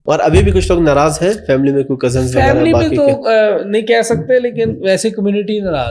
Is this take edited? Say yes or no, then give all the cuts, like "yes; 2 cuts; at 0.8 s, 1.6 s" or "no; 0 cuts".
no; 0 cuts